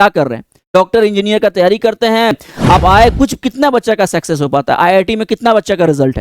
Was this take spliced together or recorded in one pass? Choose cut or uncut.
cut